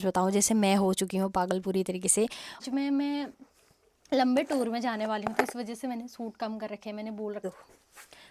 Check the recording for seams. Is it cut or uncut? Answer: cut